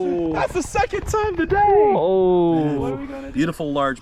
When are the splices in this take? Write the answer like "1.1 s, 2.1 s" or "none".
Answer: 3.0 s

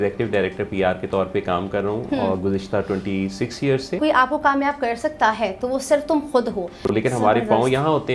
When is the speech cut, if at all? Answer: 4.0 s, 6.9 s

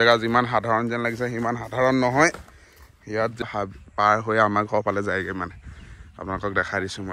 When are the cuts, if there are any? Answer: 3.4 s

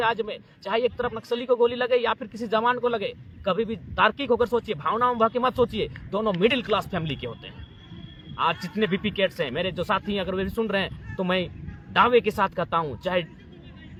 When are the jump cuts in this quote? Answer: none

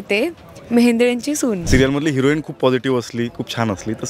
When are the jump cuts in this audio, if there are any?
1.6 s

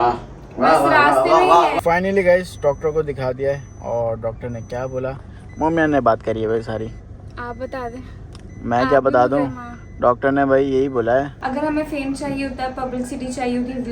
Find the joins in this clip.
1.7 s, 11.3 s

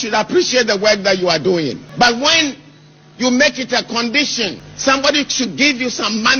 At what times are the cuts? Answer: 1.8 s, 4.7 s

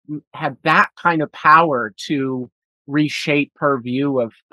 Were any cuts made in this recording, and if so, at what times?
3.5 s

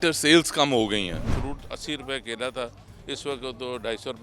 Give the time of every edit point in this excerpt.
1.2 s

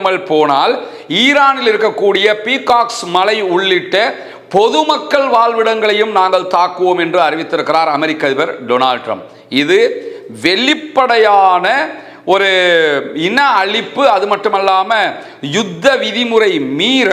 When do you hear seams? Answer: none

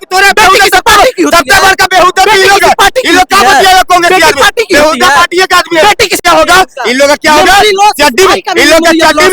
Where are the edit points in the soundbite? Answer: 6.2 s

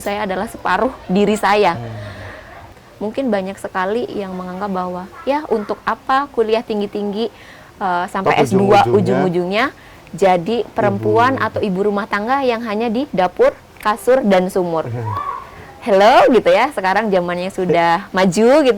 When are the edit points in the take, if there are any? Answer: 2.7 s

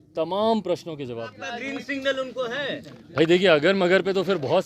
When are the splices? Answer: 1.4 s

